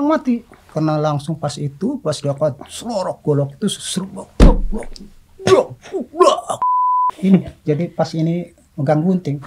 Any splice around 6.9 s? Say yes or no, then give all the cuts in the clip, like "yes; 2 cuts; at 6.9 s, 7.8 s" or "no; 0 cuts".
yes; 1 cut; at 6.9 s